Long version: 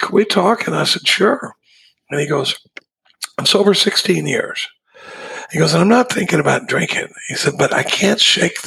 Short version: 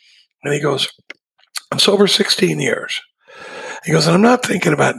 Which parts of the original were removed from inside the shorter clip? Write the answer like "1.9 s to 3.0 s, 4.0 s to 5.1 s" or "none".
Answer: none